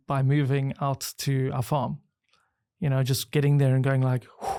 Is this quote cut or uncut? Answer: uncut